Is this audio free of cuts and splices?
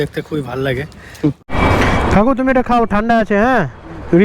no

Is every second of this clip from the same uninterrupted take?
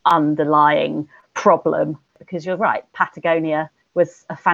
no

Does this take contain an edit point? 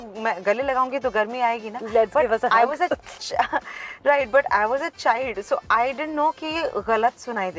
no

